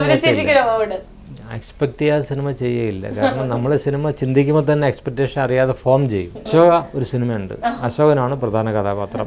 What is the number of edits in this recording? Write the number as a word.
one